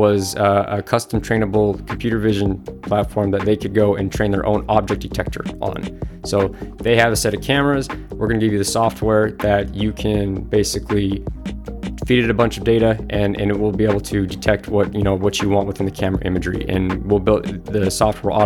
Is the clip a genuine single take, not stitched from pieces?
yes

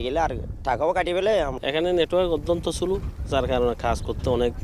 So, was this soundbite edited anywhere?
yes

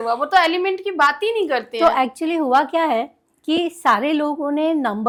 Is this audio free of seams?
yes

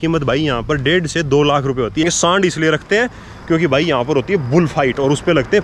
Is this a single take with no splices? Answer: no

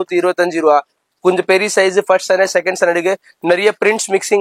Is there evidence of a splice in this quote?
no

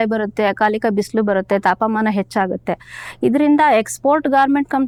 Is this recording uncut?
yes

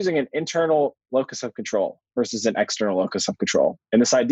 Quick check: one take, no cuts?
yes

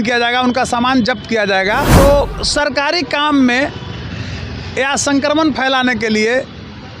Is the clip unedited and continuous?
no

